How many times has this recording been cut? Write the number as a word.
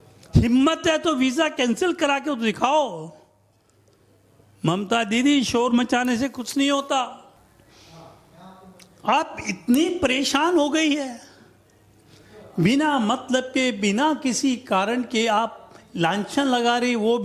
one